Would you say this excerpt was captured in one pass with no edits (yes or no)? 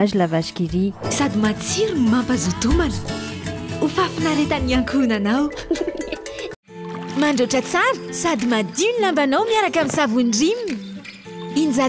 no